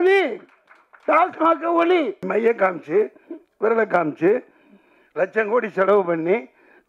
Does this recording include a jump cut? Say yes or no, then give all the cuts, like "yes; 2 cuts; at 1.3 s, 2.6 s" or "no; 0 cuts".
yes; 1 cut; at 2.2 s